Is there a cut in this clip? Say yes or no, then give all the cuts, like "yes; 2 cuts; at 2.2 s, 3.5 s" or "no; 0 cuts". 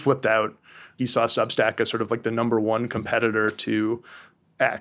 yes; 1 cut; at 1.0 s